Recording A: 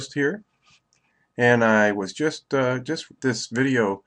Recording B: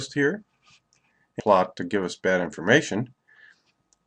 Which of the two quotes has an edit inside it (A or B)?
A